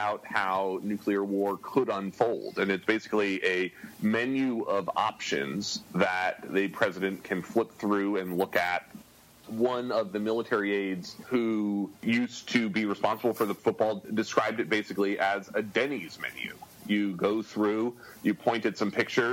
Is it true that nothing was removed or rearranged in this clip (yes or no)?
no